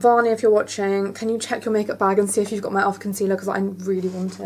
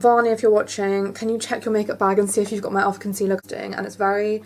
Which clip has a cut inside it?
second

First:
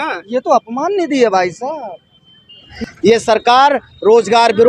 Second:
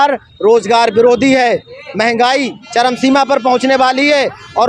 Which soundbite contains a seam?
first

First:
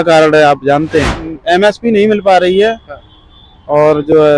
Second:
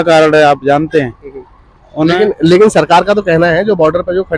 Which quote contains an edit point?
first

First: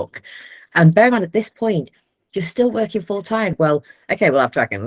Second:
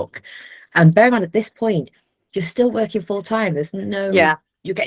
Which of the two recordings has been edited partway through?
first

